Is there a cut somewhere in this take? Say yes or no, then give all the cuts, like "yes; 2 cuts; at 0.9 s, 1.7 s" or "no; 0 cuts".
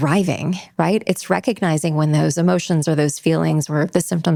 no; 0 cuts